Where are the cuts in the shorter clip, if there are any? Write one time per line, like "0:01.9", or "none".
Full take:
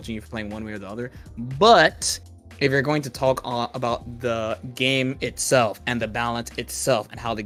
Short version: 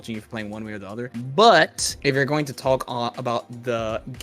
0:01.1
0:01.9